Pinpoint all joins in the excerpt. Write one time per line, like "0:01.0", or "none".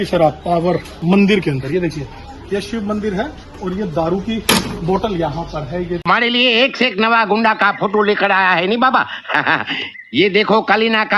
0:00.9
0:06.0